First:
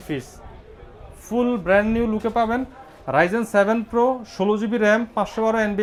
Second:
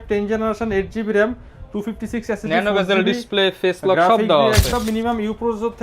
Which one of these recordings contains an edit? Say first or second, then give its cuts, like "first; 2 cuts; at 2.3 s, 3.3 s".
second; 1 cut; at 4.7 s